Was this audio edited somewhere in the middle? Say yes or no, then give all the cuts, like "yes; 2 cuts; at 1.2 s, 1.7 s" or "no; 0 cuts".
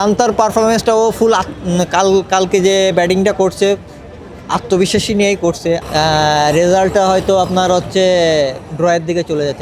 yes; 1 cut; at 5.8 s